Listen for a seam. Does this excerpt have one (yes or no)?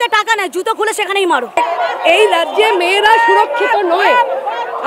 yes